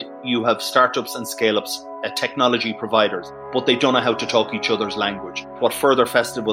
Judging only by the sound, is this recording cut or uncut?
cut